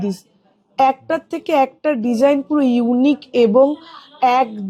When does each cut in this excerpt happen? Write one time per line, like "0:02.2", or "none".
none